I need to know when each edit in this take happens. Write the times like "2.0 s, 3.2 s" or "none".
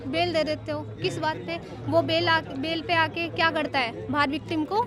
none